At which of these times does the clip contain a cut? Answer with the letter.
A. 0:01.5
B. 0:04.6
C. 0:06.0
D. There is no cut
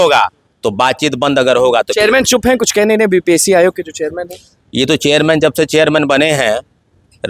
D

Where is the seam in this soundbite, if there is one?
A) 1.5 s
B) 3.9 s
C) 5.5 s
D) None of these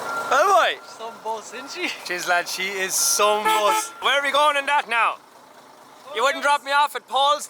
B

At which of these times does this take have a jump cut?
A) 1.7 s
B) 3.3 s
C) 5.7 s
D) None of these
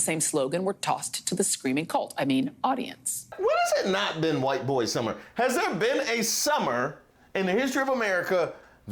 B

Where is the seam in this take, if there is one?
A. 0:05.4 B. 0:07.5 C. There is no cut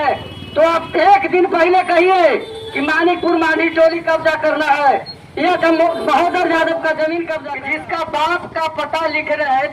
B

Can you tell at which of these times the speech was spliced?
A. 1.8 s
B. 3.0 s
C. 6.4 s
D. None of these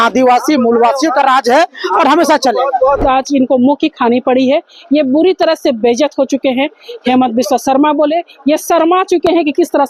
B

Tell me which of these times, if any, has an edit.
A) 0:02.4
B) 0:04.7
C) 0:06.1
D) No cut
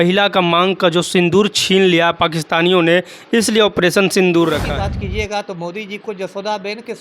B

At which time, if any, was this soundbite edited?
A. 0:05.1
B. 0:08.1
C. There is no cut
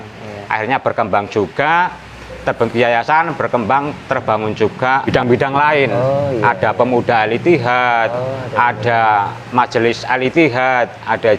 A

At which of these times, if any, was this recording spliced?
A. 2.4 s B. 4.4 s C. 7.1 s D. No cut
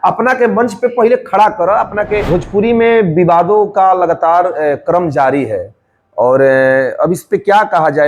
A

